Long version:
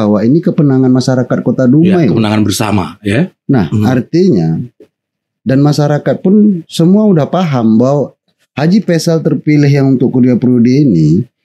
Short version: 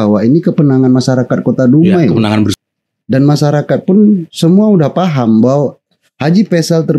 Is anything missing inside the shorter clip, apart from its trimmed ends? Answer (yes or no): yes